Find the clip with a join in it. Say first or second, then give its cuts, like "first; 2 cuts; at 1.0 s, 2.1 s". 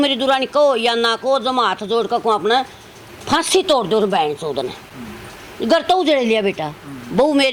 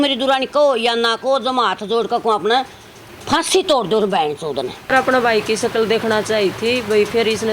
second; 1 cut; at 4.9 s